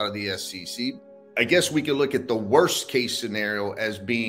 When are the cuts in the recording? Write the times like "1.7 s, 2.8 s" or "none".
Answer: 0.9 s